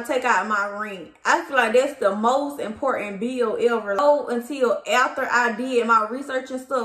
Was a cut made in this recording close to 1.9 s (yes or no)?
no